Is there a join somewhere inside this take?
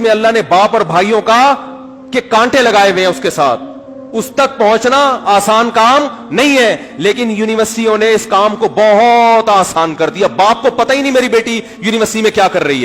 no; 0 cuts

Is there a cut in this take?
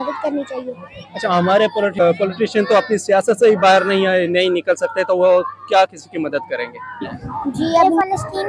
yes; 2 cuts; at 2.0 s, 7.8 s

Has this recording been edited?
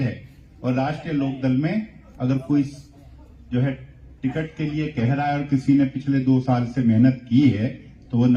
no; 0 cuts

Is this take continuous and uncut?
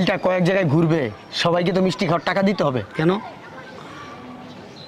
yes; 0 cuts

